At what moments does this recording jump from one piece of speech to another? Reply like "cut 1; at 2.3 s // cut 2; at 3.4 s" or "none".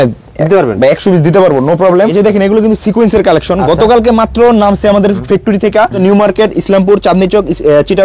cut 1; at 2.2 s // cut 2; at 6.0 s